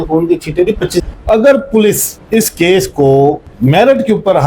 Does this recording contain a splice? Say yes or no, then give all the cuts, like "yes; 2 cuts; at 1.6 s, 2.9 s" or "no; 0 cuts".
yes; 1 cut; at 1.0 s